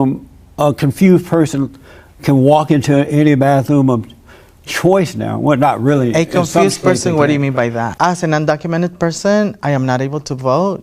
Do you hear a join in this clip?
yes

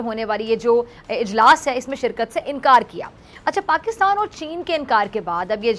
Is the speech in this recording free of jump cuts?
yes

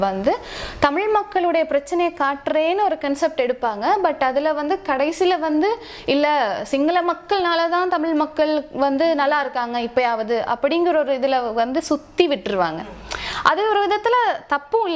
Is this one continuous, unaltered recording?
yes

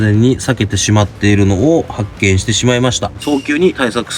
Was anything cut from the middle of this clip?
yes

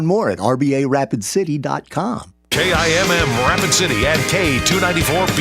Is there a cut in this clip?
yes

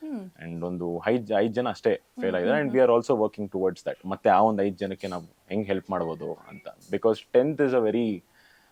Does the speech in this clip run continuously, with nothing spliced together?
yes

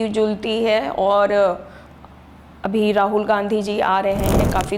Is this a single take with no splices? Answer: yes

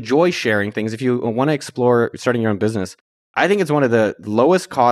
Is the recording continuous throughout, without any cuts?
yes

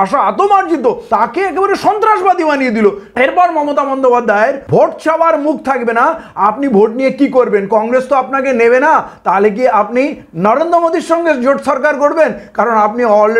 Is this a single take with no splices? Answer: no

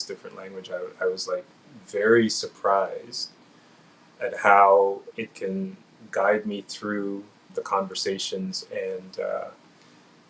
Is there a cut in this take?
no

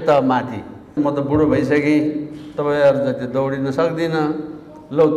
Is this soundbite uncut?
no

